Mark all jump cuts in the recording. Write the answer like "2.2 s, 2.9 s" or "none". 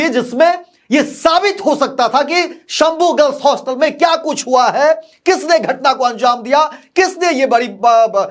none